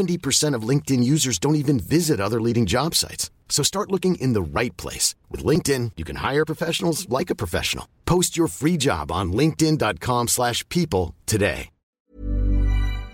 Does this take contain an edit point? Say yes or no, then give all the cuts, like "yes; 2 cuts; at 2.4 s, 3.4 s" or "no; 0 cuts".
yes; 1 cut; at 12.1 s